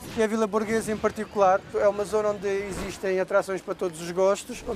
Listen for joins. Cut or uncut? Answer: cut